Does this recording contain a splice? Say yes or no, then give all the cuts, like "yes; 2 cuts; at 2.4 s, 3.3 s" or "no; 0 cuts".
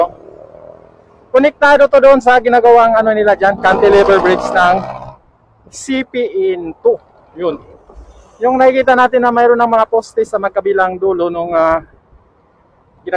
no; 0 cuts